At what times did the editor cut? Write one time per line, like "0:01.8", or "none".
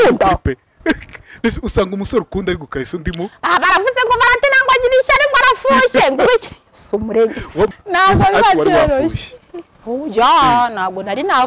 0:07.7